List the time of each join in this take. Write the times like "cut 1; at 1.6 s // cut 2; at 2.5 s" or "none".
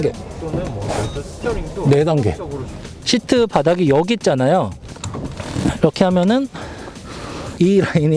cut 1; at 2.7 s